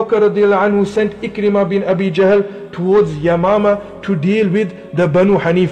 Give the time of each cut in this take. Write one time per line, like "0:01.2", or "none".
0:02.6